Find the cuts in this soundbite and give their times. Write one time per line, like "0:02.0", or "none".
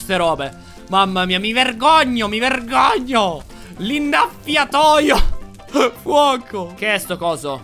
none